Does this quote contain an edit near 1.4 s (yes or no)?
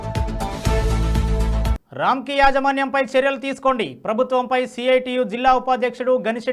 yes